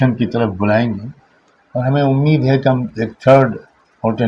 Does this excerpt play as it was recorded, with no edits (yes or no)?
yes